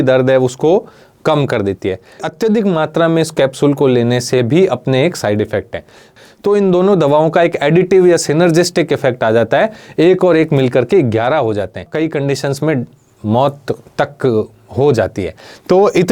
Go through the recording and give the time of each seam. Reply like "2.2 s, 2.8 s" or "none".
2.3 s, 6.1 s, 11.9 s